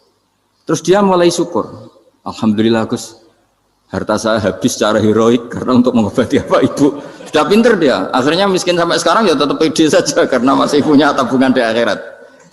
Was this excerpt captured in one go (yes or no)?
yes